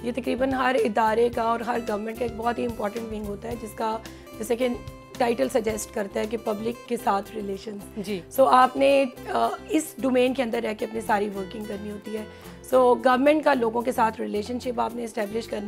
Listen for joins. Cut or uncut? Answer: uncut